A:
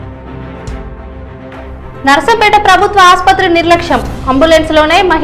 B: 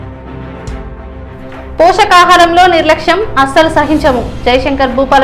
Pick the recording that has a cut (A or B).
B